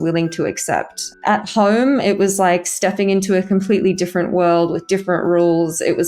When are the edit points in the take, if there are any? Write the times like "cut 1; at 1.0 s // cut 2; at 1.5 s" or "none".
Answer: cut 1; at 1.1 s